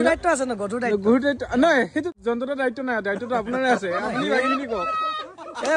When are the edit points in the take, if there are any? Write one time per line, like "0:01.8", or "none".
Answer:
0:02.1